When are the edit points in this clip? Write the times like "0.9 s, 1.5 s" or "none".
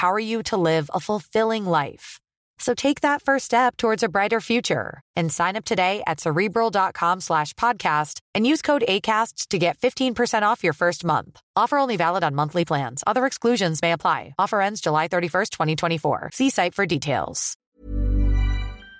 17.7 s